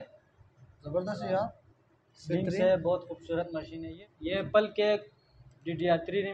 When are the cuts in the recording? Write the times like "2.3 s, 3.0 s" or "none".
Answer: 3.7 s